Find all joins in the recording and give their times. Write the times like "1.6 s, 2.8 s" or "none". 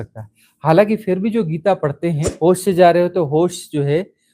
2.3 s